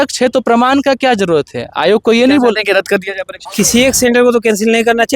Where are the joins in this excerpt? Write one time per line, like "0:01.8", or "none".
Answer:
0:03.4